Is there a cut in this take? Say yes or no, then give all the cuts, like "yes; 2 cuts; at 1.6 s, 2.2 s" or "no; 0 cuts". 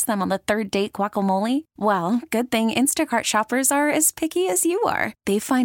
no; 0 cuts